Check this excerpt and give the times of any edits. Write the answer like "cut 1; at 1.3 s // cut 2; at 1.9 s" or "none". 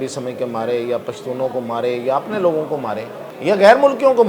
cut 1; at 3.2 s